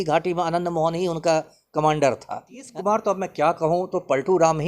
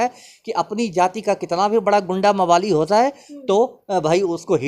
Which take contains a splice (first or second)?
first